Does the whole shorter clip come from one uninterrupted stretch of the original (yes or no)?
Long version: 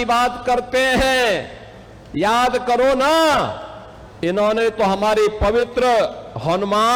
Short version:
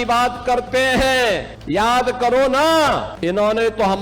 no